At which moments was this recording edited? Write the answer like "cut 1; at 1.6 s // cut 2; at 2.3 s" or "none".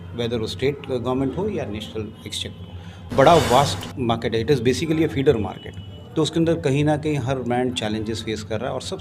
cut 1; at 3.1 s